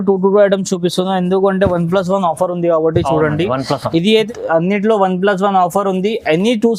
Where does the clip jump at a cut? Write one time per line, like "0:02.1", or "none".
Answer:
0:04.3